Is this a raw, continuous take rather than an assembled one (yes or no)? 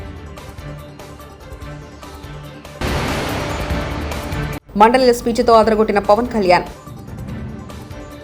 yes